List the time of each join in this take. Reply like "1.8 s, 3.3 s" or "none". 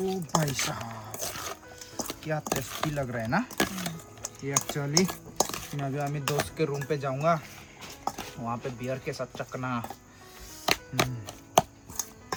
none